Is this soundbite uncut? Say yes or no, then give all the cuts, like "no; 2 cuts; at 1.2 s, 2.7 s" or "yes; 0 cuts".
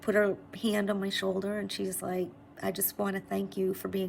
yes; 0 cuts